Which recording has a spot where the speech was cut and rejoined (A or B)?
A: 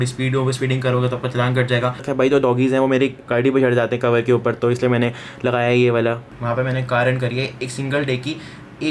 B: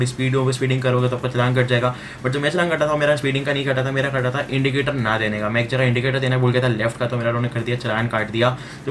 A